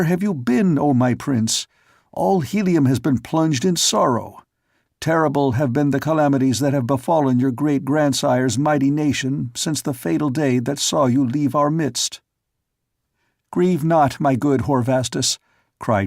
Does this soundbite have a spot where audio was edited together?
yes; 1 cut; at 10.2 s

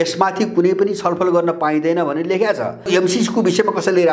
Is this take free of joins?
no; 1 cut; at 2.9 s

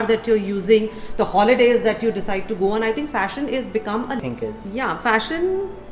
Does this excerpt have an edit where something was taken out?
yes; 1 cut; at 4.2 s

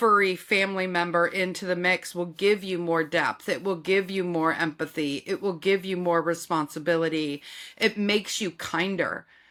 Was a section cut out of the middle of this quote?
no; 0 cuts

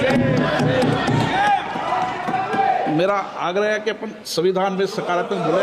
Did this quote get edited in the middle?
no; 0 cuts

